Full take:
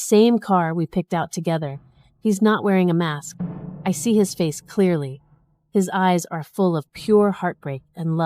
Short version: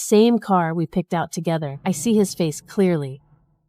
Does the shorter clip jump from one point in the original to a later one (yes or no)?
yes